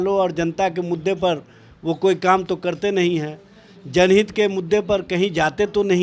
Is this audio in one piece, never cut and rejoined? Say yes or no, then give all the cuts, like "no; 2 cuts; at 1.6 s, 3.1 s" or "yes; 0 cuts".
yes; 0 cuts